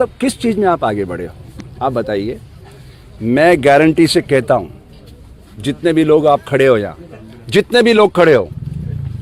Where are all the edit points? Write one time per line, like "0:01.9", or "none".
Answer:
none